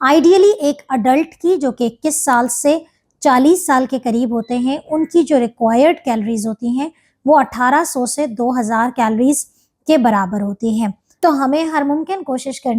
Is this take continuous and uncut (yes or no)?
no